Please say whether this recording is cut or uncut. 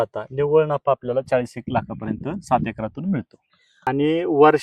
cut